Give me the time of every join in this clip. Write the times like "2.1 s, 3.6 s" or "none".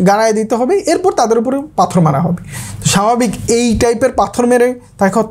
none